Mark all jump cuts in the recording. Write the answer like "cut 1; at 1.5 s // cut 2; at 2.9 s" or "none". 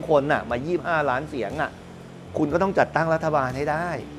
none